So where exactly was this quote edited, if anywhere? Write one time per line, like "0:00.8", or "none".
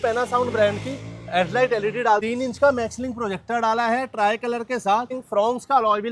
0:02.2
0:05.2